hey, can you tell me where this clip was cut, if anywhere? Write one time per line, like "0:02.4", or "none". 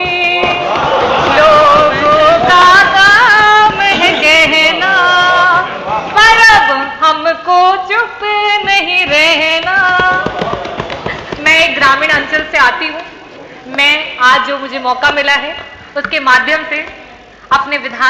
none